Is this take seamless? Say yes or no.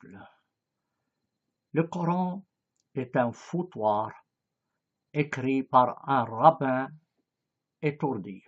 no